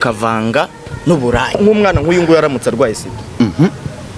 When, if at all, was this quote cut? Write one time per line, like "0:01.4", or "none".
0:01.6